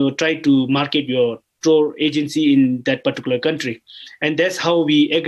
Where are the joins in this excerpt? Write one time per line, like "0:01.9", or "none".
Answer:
0:01.5